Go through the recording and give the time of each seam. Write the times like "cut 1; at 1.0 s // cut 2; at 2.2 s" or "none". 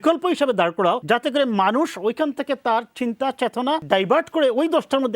cut 1; at 1.0 s // cut 2; at 3.8 s

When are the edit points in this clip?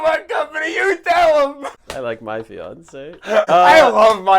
cut 1; at 1.8 s // cut 2; at 3.5 s

